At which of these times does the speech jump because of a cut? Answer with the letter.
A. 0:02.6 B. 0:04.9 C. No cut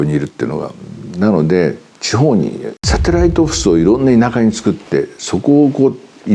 A